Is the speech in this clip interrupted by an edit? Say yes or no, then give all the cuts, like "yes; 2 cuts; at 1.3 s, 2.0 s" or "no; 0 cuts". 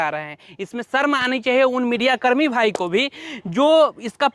no; 0 cuts